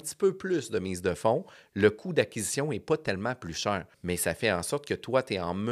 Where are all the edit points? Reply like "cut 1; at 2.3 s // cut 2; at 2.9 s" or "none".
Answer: cut 1; at 3.9 s